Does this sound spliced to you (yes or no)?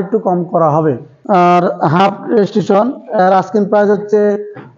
yes